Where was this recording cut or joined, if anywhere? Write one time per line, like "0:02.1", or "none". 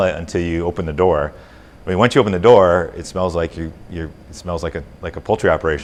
none